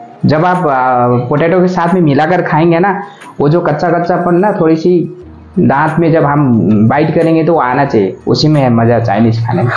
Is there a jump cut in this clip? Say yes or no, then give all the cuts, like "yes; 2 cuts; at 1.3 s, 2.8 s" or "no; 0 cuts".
no; 0 cuts